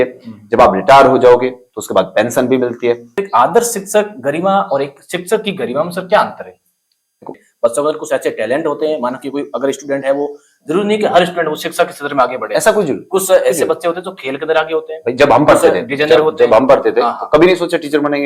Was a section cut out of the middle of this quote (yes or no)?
yes